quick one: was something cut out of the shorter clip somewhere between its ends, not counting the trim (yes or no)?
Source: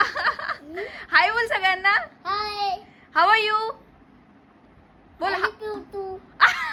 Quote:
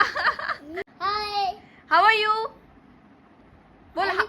yes